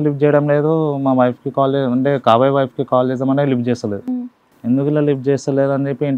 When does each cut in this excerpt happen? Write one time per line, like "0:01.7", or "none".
none